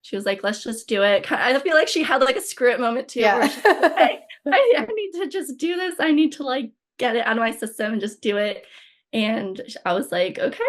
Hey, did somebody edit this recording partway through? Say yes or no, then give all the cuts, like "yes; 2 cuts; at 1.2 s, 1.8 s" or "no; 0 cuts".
no; 0 cuts